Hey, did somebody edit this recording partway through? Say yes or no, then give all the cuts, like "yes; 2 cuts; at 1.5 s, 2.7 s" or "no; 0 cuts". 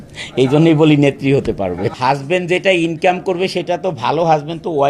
yes; 1 cut; at 2.0 s